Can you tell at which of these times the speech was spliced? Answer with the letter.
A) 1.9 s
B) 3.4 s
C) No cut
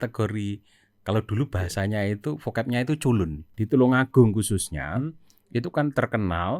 B